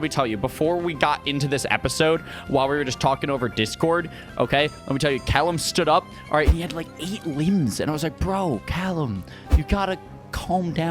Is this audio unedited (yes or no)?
yes